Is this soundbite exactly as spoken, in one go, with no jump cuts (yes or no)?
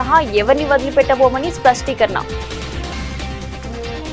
yes